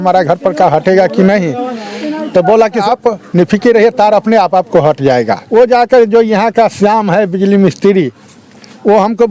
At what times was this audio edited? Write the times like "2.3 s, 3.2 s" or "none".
2.8 s, 5.4 s